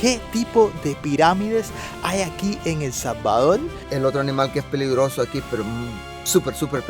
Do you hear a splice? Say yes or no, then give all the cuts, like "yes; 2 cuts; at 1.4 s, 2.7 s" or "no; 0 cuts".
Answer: yes; 1 cut; at 3.8 s